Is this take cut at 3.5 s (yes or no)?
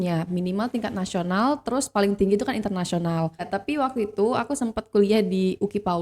yes